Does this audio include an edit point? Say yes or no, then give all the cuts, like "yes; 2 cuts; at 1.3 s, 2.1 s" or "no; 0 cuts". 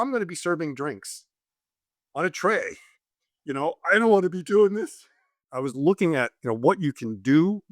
yes; 1 cut; at 5.4 s